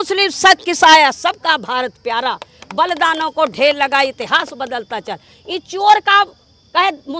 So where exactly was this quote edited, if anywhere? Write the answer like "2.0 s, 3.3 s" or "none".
none